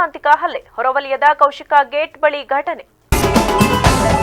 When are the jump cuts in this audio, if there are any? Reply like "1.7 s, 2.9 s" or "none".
2.9 s